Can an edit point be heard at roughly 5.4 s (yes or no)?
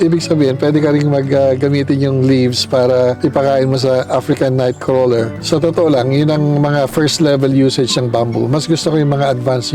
yes